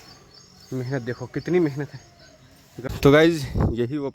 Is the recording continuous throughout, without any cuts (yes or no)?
no